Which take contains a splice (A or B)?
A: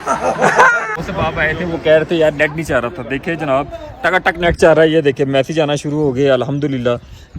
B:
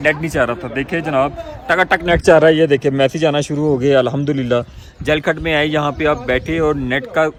A